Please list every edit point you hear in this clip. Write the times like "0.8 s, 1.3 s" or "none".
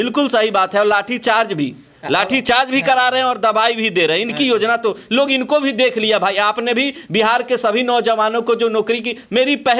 none